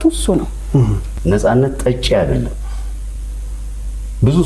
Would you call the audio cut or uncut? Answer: cut